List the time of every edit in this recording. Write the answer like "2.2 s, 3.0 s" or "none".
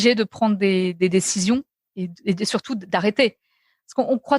none